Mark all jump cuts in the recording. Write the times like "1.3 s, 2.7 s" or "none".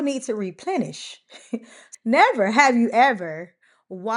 1.8 s

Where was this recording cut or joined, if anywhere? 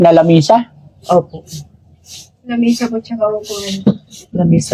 none

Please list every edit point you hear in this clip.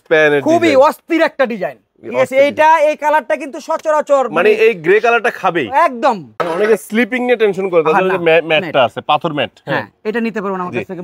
6.3 s

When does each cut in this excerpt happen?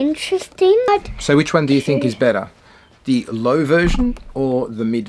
0.9 s

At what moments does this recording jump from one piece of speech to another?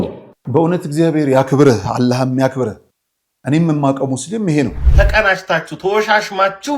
4.8 s

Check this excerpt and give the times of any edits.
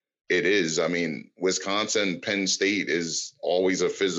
none

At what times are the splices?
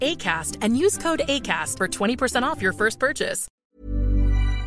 3.4 s

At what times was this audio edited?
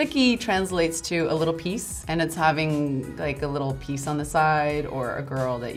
none

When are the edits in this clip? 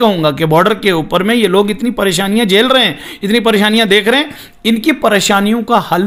none

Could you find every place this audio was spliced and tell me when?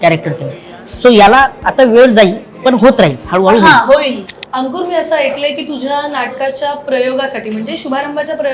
4.2 s

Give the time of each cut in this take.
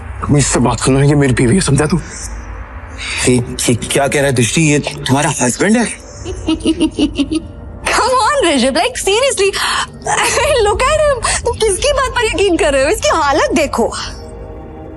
6.4 s

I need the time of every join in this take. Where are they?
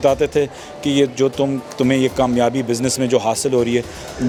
none

